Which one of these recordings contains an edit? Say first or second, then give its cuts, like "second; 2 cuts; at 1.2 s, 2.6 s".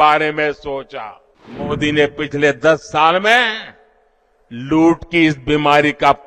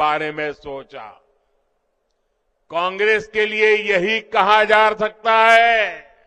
first; 1 cut; at 1.7 s